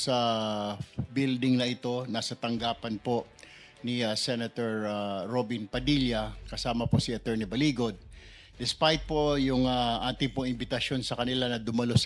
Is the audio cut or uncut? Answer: uncut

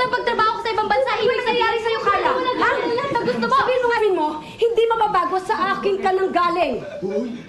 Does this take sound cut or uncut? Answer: uncut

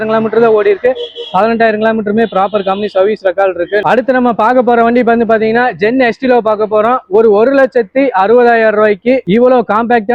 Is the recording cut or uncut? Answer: cut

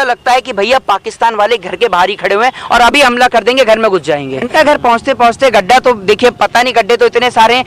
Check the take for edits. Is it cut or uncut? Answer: cut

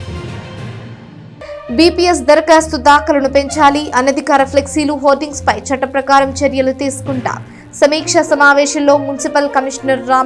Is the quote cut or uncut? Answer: cut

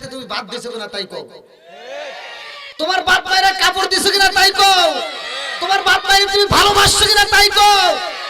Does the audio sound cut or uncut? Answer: uncut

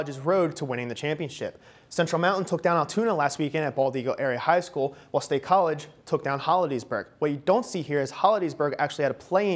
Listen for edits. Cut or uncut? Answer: uncut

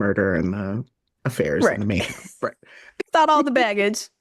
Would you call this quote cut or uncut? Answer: cut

